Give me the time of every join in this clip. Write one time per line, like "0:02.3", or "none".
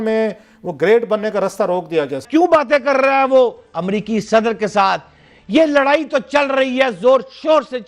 0:02.2

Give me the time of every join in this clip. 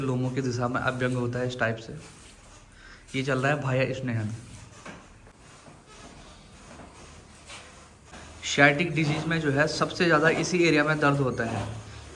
0:05.3
0:08.1

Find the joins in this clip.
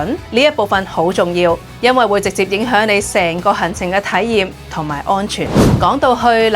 0:05.6

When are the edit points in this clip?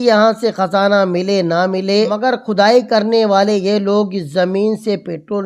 0:02.1

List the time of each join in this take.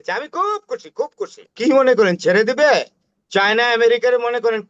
0:01.5

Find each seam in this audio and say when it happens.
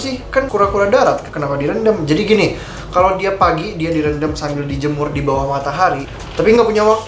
0:06.2

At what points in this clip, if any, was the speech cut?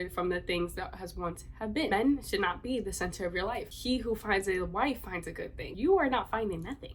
0:01.9
0:03.7

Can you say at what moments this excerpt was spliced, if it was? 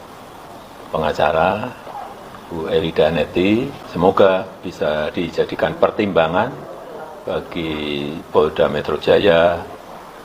0:03.8

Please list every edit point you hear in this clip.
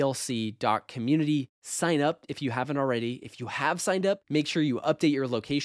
none

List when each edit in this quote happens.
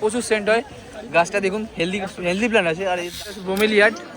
0:03.2

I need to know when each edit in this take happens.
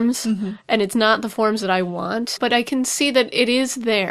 0:02.4

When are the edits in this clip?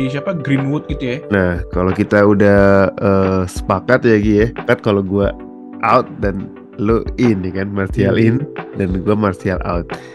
0:01.2

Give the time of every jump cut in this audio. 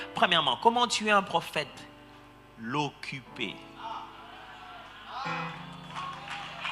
none

